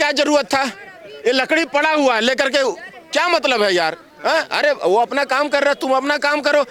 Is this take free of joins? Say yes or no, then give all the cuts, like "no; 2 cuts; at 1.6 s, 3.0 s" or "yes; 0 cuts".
yes; 0 cuts